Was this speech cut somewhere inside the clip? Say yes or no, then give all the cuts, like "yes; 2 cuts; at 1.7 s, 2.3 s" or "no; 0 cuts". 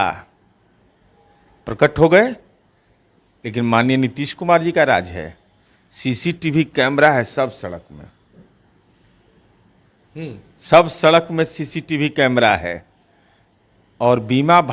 no; 0 cuts